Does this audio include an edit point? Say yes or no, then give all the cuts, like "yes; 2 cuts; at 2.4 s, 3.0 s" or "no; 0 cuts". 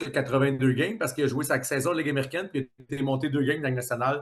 no; 0 cuts